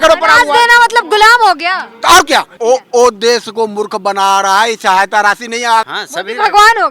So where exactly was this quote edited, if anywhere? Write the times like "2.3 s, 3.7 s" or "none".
2.5 s, 5.9 s